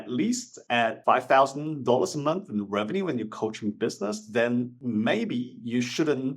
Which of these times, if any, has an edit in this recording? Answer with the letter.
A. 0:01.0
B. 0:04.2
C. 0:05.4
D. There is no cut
A